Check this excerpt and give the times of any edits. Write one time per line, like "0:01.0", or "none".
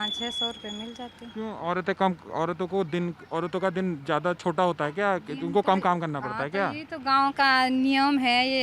none